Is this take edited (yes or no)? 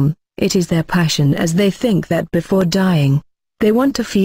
no